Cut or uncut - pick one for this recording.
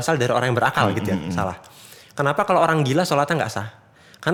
uncut